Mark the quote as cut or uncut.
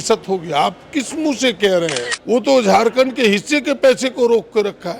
cut